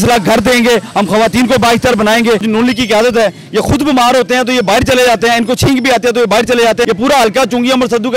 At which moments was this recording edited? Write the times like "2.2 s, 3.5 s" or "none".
2.4 s, 6.8 s